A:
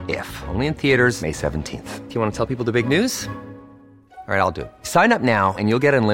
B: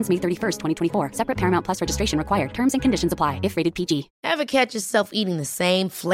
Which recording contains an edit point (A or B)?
B